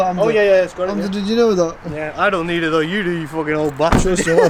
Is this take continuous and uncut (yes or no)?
yes